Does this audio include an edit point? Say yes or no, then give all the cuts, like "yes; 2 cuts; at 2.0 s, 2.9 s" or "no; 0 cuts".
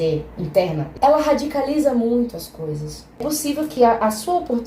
yes; 2 cuts; at 0.9 s, 3.2 s